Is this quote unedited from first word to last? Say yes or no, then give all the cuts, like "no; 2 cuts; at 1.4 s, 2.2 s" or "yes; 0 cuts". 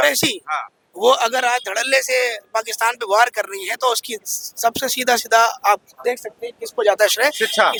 yes; 0 cuts